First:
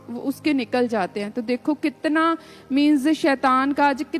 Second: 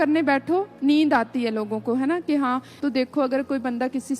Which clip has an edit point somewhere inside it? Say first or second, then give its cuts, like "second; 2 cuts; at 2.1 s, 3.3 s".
second; 1 cut; at 2.7 s